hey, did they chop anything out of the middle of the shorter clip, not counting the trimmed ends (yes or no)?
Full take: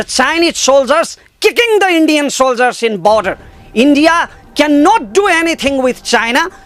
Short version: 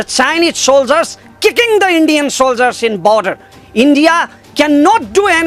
no